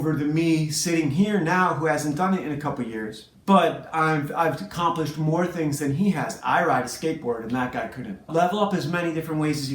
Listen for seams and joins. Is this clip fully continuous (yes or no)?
no